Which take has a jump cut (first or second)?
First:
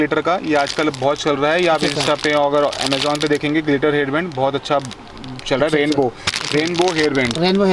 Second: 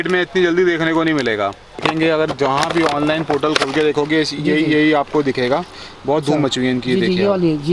second